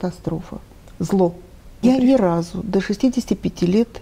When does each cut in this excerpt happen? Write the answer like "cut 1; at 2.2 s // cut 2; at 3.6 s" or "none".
cut 1; at 1.8 s